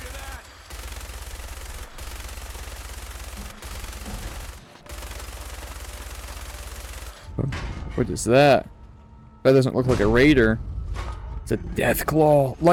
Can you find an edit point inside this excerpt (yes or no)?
yes